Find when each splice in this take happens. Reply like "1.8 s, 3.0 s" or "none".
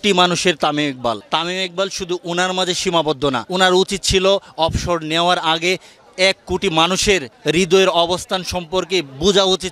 1.2 s, 3.4 s, 7.3 s